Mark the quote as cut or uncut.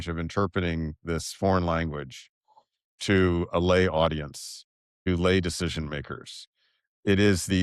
uncut